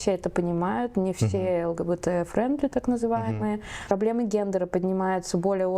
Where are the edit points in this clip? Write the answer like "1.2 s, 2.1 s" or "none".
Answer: 3.9 s